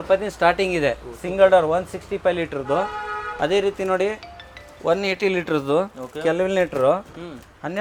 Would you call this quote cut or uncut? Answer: uncut